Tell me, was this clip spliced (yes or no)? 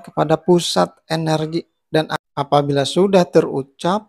yes